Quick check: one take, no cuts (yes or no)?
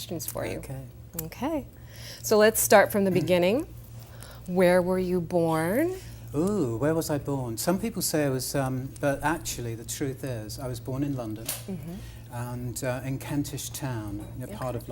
no